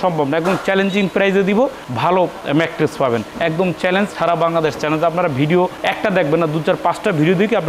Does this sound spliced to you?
no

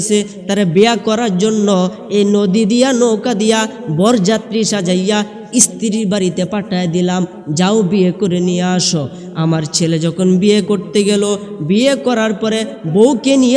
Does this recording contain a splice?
no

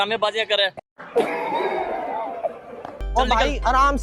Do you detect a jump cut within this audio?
no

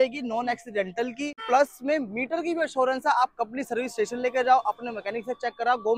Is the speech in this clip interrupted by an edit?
yes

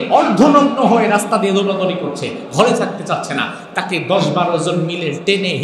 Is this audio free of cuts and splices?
yes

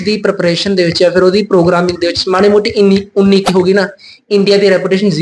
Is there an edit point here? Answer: no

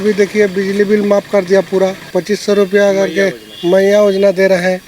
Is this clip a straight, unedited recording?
no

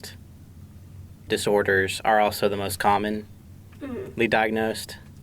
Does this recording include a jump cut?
yes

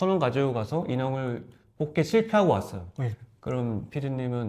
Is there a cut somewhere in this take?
no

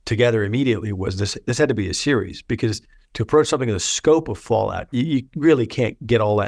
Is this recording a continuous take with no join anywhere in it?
yes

